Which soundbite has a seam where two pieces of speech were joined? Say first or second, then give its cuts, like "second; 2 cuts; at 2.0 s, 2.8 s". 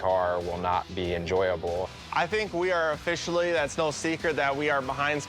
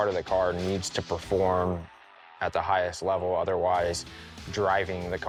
first; 1 cut; at 1.9 s